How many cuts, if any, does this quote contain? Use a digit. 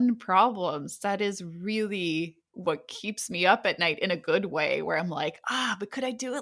0